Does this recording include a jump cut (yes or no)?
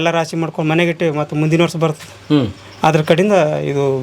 no